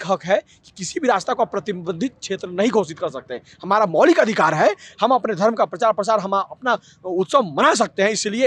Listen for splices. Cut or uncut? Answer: uncut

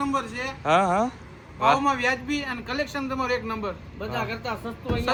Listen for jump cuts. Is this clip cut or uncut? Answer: uncut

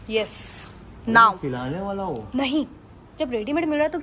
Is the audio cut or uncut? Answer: uncut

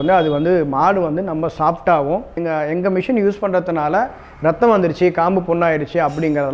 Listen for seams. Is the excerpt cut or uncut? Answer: cut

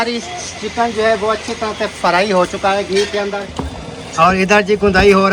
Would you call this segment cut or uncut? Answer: cut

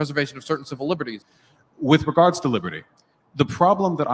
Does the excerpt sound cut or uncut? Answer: cut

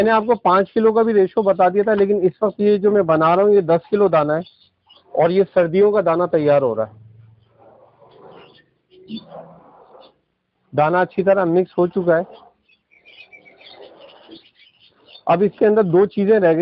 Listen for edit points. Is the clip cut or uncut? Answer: uncut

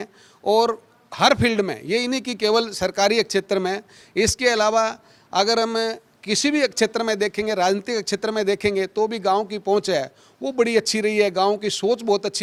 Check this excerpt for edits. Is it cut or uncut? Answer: uncut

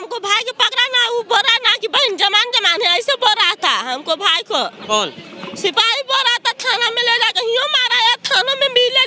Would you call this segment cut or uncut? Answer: uncut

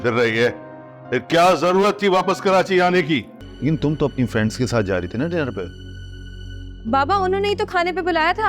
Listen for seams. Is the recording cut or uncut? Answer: cut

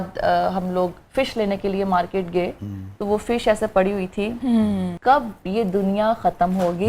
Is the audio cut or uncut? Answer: cut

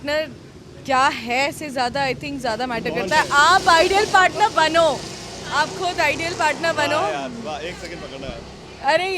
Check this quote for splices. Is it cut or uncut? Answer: uncut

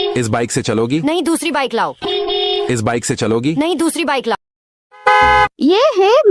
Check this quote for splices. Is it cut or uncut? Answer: cut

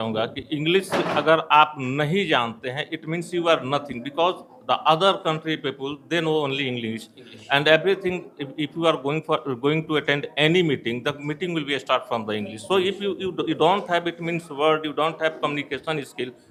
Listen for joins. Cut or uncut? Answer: uncut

